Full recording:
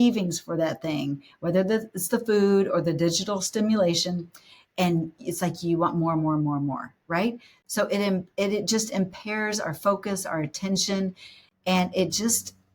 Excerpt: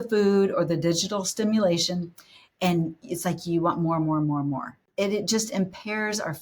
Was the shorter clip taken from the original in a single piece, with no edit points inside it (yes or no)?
no